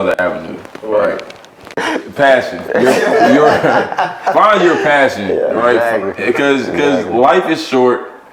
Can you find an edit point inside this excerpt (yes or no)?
no